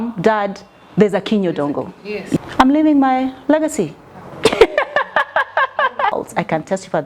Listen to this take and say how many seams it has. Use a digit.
2